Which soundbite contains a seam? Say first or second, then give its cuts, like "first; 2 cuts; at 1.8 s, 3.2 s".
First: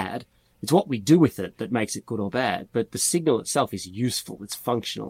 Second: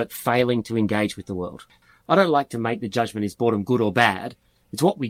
second; 1 cut; at 1.8 s